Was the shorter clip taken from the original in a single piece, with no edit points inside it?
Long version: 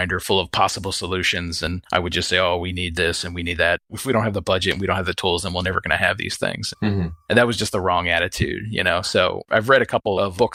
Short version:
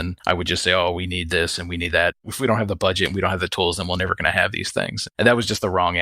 no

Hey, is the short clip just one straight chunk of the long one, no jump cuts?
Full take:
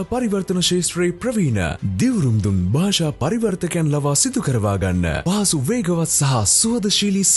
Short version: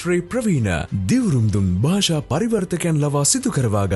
yes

